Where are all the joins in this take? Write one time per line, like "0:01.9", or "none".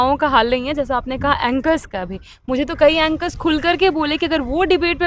none

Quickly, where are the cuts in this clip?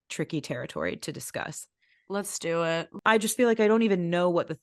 0:02.9

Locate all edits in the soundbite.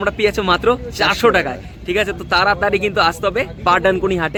none

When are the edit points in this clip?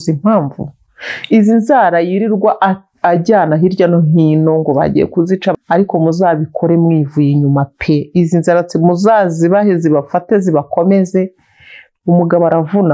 0:05.5

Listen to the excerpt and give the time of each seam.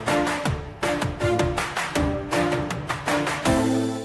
none

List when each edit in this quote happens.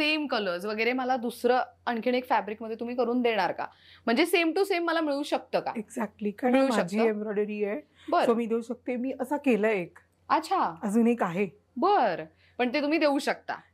none

